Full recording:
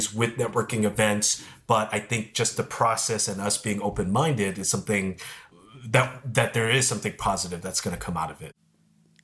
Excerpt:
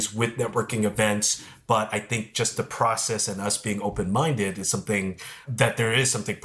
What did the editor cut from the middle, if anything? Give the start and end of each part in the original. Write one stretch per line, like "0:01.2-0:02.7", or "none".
0:05.4-0:06.2